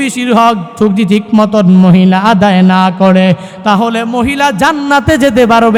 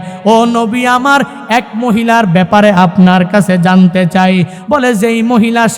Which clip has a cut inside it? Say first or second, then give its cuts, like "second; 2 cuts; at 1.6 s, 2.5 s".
second; 1 cut; at 4.6 s